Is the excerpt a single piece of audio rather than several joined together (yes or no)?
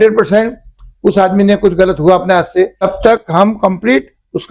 no